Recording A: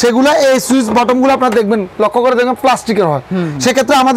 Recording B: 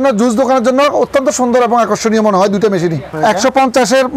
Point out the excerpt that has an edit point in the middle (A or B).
B